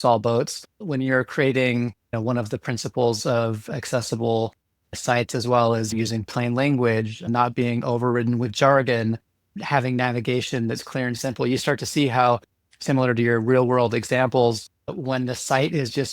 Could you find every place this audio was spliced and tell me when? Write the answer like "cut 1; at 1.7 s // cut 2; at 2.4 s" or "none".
cut 1; at 2.0 s

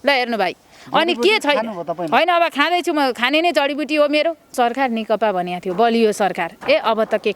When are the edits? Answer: cut 1; at 4.5 s

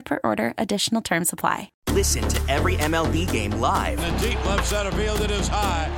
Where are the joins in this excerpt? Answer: cut 1; at 1.7 s

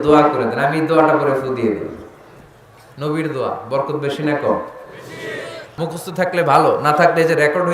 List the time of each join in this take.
cut 1; at 5.7 s

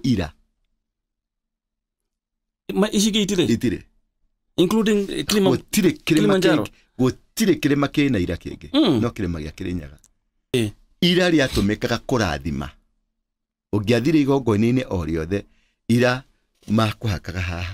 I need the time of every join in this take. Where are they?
cut 1; at 10.5 s

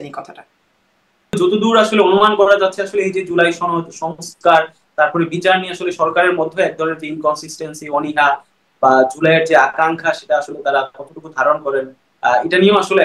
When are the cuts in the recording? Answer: cut 1; at 1.3 s

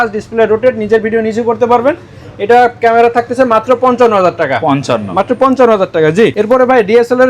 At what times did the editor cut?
none

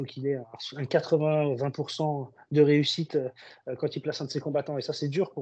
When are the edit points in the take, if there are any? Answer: none

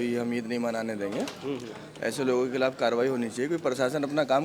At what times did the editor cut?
none

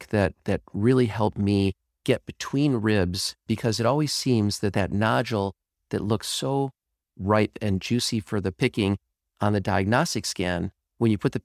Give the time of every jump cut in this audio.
none

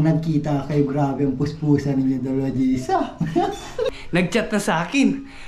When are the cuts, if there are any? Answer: cut 1; at 4.0 s

